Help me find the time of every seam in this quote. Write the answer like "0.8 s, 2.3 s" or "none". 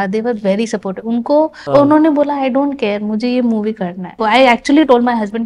1.6 s, 4.2 s